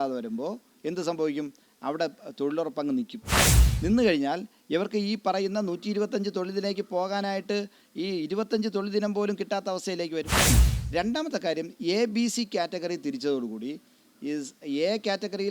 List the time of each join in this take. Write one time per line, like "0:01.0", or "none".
0:10.5